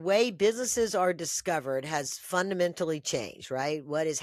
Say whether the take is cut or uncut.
uncut